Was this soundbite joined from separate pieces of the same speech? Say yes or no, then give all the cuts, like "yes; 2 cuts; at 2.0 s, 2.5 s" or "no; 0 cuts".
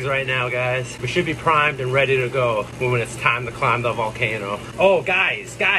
yes; 3 cuts; at 1.0 s, 2.7 s, 4.7 s